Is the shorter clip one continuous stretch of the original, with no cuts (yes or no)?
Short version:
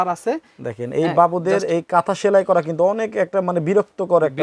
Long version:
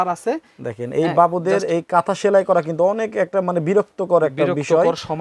yes